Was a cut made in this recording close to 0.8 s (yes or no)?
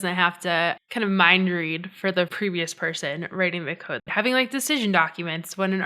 yes